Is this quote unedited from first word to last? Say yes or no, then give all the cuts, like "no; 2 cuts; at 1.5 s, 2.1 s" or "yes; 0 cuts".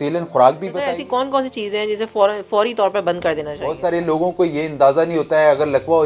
no; 2 cuts; at 0.8 s, 3.6 s